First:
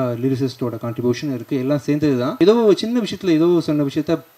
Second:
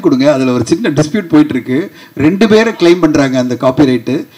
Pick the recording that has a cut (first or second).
first